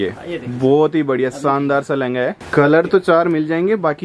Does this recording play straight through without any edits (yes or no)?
no